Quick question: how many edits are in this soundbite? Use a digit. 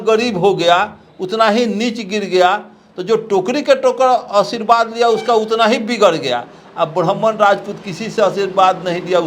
0